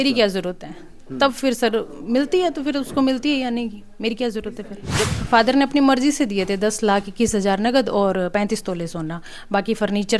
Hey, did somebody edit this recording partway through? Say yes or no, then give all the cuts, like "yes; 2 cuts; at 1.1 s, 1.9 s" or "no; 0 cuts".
yes; 1 cut; at 5.1 s